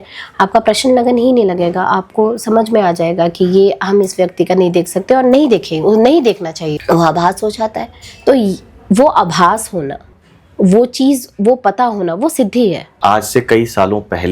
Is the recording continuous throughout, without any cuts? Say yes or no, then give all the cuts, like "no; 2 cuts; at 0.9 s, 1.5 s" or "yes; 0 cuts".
no; 2 cuts; at 6.8 s, 12.9 s